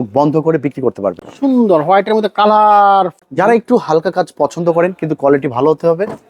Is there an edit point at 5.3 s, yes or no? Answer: no